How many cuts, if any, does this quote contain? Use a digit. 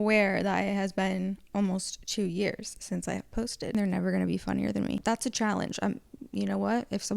2